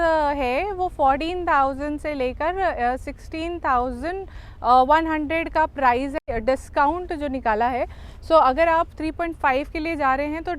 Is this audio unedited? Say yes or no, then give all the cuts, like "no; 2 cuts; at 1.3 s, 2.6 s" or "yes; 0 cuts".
no; 1 cut; at 6.2 s